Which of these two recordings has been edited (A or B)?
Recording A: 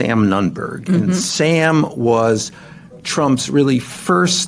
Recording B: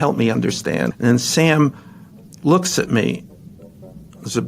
B